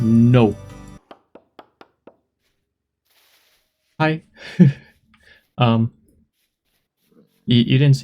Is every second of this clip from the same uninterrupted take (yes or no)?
no